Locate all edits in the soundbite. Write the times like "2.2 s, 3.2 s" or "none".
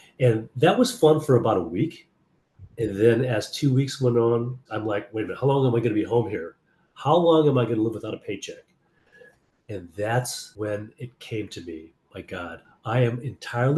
4.7 s, 10.4 s, 12.7 s